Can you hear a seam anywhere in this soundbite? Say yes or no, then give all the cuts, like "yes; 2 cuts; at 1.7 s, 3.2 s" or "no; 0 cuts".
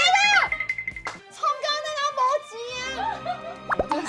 no; 0 cuts